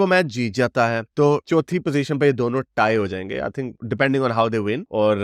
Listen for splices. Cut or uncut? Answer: uncut